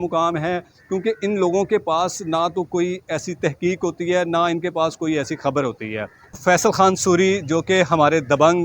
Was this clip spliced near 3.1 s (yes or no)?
no